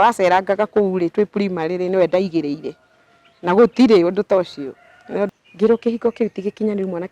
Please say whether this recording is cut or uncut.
cut